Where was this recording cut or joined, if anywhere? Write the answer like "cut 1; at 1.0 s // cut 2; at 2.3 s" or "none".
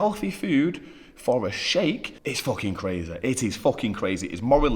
cut 1; at 2.1 s